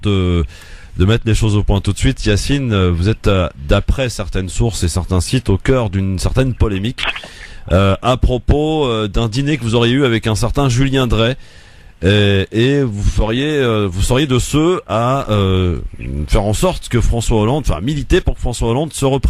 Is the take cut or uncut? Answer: uncut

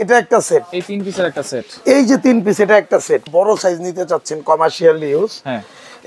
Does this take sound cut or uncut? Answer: cut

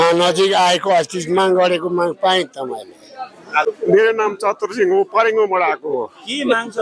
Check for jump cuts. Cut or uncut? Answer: cut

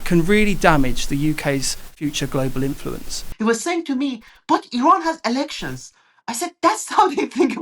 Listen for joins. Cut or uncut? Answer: cut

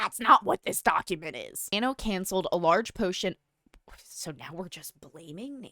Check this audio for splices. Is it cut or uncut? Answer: cut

